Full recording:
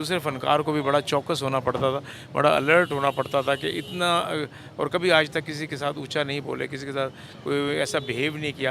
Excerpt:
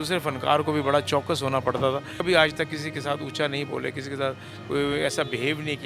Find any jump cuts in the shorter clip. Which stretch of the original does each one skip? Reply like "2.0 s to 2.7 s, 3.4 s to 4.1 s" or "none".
2.2 s to 4.9 s